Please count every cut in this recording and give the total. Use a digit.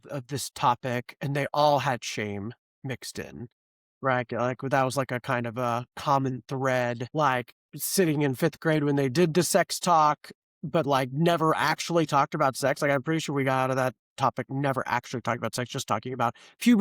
1